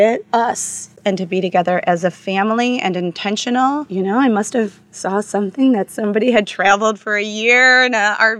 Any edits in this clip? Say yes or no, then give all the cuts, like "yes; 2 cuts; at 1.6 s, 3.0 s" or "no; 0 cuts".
yes; 2 cuts; at 0.9 s, 3.9 s